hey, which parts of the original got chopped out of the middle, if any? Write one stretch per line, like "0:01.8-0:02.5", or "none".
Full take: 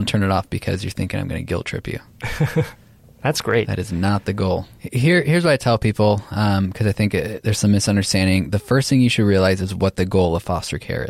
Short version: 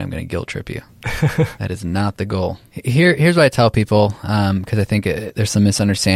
0:02.9-0:03.8

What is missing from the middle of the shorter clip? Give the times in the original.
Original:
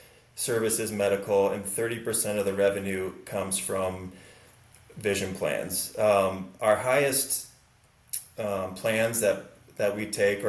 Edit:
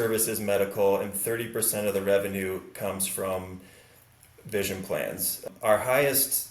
0:05.9-0:06.4

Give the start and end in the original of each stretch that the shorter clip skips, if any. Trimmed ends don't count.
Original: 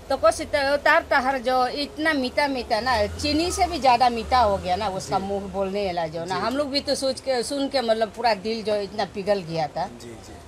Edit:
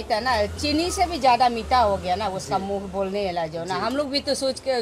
none

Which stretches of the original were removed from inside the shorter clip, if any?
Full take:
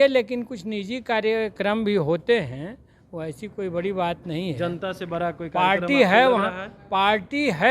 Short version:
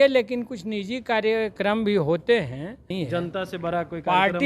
0:02.9-0:04.4

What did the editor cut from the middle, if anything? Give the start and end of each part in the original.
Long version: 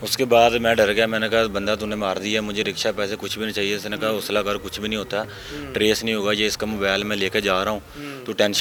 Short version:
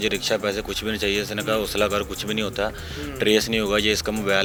none

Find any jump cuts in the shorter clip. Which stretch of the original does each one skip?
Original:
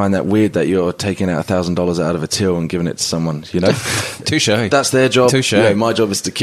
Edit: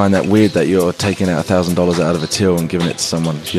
none

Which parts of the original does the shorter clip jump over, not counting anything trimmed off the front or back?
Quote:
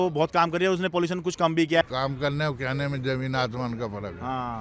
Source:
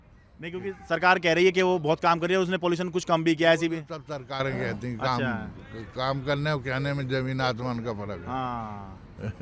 0:03.5-0:05.9

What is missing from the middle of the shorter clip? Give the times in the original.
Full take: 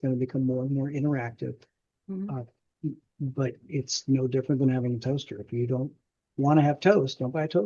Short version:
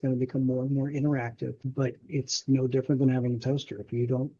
0:01.6-0:03.2

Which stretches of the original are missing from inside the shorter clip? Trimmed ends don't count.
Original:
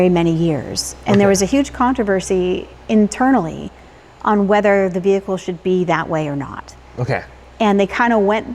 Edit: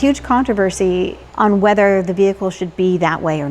0:02.7-0:04.1

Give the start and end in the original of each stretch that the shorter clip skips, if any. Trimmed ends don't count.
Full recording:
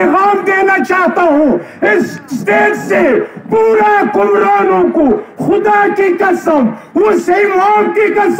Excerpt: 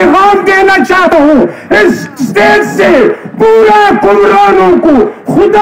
0:01.1-0:01.2

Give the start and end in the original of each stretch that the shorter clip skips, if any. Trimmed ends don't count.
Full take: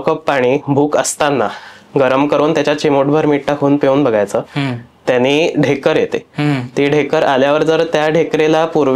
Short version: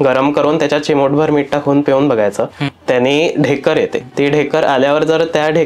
0:04.6-0:04.9
0:06.3-0:06.7

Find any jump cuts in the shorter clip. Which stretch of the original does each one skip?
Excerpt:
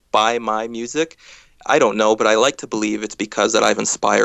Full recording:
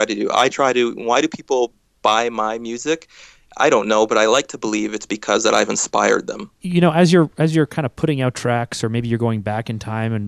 none

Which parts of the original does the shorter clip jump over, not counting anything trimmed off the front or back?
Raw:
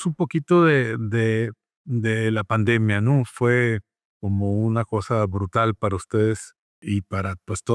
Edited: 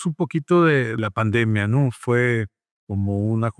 0:01.0-0:02.3

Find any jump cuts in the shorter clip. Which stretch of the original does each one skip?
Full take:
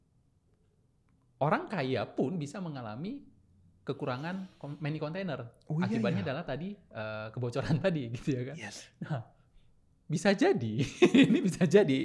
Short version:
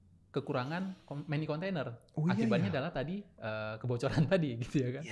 none

